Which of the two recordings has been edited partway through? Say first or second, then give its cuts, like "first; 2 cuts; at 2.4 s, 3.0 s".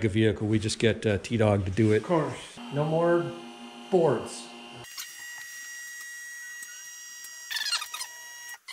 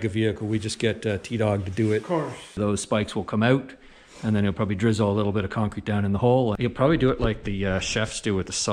second; 2 cuts; at 2.5 s, 6.6 s